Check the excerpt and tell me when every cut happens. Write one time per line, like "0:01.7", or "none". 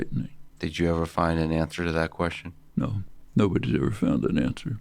0:01.0